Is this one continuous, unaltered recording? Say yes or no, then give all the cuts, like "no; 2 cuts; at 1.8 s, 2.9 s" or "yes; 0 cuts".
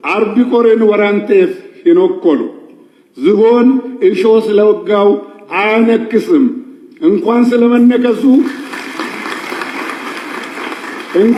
yes; 0 cuts